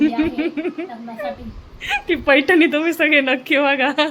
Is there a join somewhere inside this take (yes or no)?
no